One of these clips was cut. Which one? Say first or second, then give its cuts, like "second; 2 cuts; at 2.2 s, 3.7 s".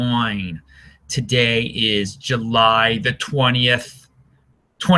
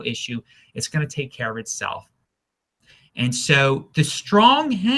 second; 1 cut; at 3.6 s